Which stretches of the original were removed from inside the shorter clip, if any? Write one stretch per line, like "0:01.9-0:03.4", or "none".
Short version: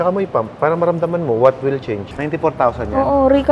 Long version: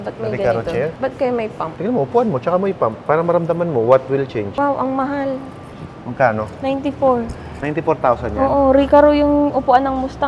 0:04.5-0:07.5